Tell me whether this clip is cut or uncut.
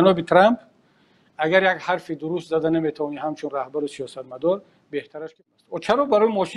cut